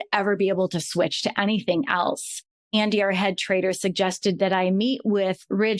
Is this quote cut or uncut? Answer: cut